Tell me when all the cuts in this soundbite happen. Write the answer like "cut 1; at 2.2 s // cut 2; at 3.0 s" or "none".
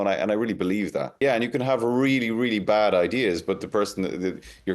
cut 1; at 1.2 s